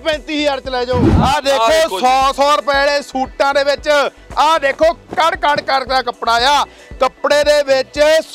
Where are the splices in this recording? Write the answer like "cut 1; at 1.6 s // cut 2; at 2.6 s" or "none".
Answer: cut 1; at 1.1 s